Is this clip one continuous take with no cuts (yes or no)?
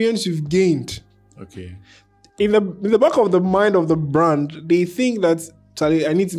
yes